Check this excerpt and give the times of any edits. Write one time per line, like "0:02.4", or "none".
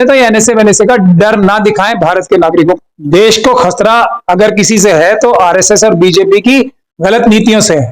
0:02.9

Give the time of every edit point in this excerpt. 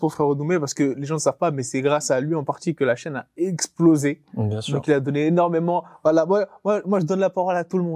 none

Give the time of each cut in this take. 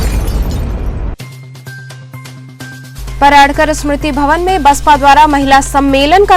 0:02.8

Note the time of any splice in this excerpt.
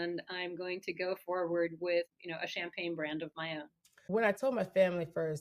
0:02.1
0:04.0

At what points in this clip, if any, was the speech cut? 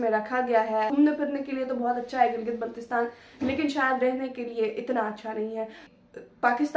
0:00.9
0:05.8

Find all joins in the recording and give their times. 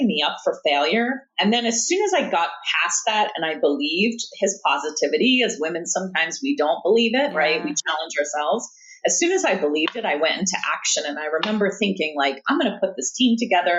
none

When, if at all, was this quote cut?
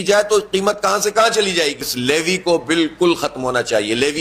0:01.9

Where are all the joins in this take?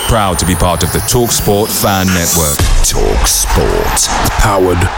none

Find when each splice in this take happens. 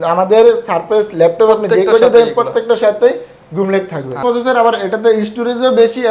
0:04.2

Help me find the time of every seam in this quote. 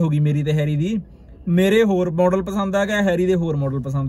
none

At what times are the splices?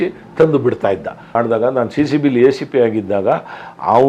0:01.3

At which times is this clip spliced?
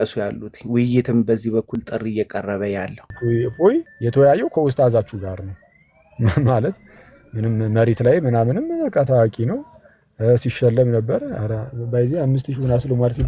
0:03.0
0:04.0

